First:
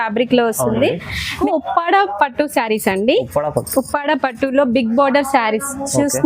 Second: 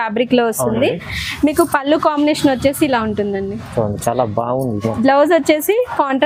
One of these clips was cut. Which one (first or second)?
first